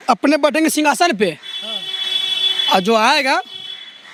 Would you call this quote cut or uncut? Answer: uncut